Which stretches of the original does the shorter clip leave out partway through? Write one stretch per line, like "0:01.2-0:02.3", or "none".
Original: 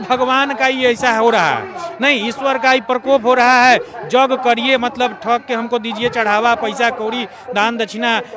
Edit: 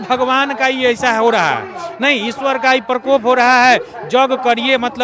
none